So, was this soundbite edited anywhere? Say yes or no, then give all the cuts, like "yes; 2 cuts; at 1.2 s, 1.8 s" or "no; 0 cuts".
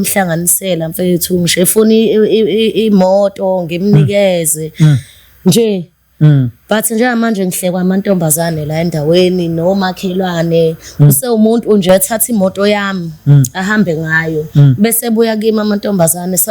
no; 0 cuts